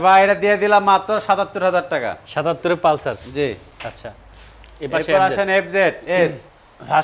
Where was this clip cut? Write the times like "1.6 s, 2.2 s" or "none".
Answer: none